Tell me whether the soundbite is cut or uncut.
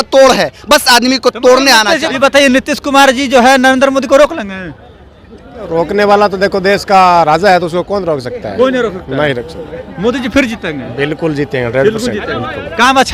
uncut